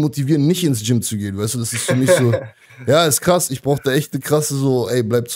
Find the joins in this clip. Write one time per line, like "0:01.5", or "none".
none